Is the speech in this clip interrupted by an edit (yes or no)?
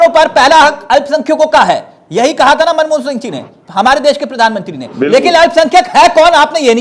no